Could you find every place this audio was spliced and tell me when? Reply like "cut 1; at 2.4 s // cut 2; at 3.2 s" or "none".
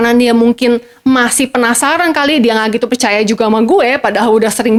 none